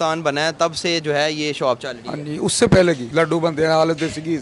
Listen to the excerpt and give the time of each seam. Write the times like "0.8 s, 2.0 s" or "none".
3.0 s